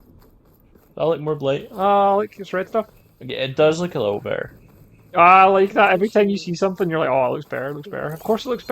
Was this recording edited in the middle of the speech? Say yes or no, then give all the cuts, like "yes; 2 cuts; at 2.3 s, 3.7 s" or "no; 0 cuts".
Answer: yes; 1 cut; at 0.9 s